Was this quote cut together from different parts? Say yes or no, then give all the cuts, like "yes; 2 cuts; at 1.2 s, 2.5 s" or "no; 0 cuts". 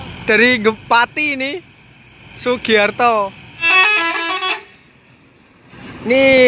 yes; 1 cut; at 3.6 s